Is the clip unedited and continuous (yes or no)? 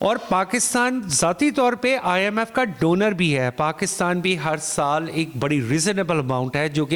yes